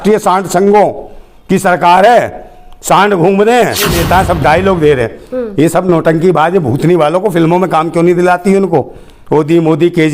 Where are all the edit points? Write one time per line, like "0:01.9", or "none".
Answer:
0:04.0